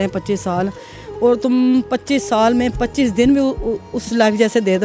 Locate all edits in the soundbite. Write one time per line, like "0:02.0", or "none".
none